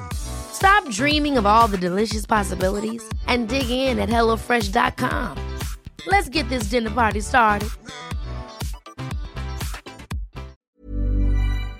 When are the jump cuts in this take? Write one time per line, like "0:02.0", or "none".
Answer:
0:10.6